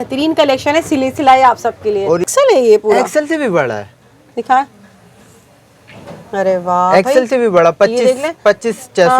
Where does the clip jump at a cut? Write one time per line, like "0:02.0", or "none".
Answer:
0:02.3